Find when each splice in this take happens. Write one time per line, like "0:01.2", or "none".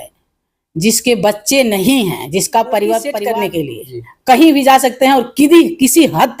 0:03.3